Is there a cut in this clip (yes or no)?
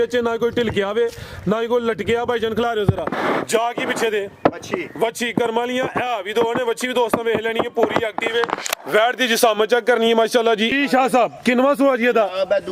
yes